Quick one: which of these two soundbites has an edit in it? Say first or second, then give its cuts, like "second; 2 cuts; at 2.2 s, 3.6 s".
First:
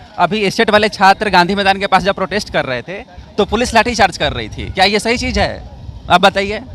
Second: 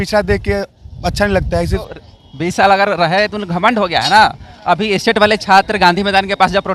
second; 1 cut; at 1.9 s